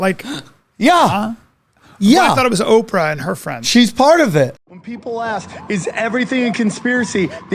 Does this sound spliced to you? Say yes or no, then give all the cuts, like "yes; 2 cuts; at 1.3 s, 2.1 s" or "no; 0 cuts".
yes; 1 cut; at 4.6 s